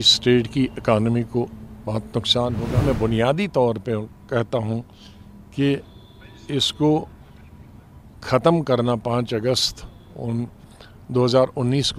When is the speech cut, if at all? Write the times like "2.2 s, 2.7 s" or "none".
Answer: 2.8 s